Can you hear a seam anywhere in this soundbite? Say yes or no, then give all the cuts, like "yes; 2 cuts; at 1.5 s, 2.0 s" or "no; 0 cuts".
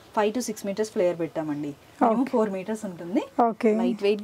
no; 0 cuts